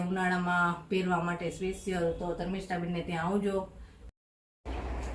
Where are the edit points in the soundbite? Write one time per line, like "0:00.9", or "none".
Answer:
0:04.1